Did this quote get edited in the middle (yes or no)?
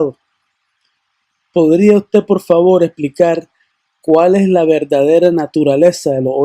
yes